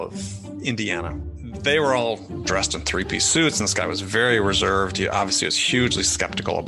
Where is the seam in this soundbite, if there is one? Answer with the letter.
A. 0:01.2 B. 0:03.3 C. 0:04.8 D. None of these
A